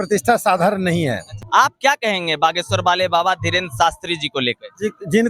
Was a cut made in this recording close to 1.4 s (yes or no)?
yes